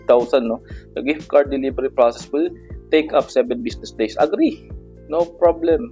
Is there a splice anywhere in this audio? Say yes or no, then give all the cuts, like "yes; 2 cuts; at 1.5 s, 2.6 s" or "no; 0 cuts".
no; 0 cuts